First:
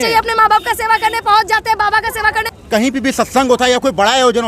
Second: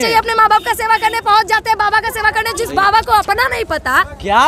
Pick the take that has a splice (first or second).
first